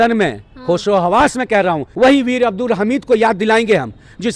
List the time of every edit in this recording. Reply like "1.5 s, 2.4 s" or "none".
1.9 s